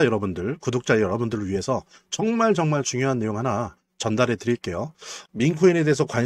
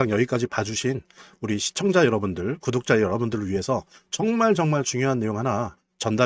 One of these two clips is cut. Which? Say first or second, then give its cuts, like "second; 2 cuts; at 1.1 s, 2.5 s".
first; 1 cut; at 5.2 s